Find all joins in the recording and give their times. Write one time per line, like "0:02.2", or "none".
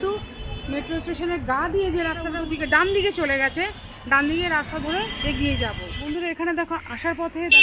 0:05.9